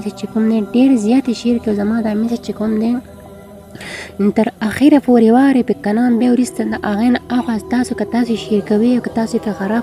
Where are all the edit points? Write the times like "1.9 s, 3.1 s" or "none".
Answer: none